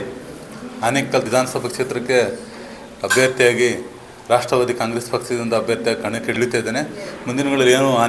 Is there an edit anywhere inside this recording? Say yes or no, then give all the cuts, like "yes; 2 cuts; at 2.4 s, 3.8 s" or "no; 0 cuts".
yes; 2 cuts; at 1.3 s, 6.3 s